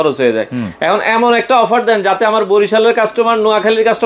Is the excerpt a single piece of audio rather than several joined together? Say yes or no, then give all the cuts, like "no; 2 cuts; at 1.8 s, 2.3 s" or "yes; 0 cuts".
yes; 0 cuts